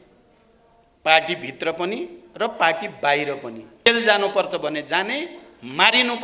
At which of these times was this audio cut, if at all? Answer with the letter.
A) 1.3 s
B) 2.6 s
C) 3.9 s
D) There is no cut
C